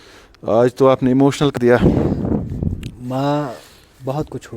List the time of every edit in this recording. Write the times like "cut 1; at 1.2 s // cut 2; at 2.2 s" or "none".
cut 1; at 1.5 s